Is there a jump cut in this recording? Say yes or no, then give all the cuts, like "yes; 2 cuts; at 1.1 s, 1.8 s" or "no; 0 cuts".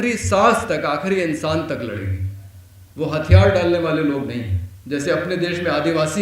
no; 0 cuts